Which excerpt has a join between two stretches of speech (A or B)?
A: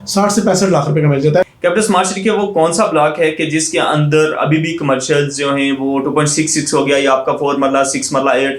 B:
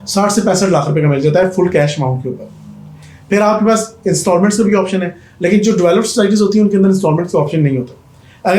A